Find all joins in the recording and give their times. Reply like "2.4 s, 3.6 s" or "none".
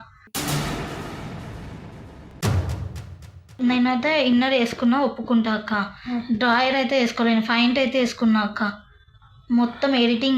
3.5 s